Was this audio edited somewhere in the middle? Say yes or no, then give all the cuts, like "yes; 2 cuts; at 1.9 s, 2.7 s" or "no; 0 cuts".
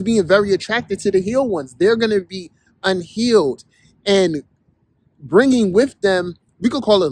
no; 0 cuts